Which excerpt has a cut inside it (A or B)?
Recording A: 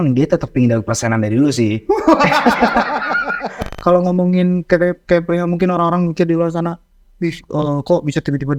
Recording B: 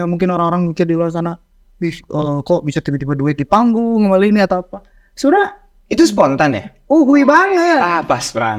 A